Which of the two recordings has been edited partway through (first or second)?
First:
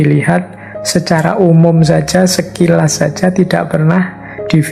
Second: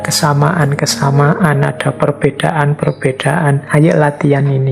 second